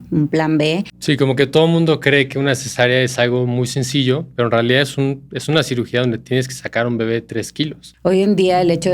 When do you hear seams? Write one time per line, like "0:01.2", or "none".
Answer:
0:00.9
0:07.8